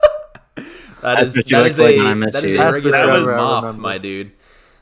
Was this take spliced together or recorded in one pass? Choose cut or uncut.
uncut